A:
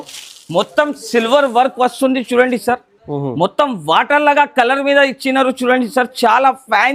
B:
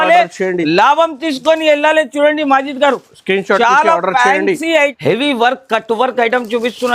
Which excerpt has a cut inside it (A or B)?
B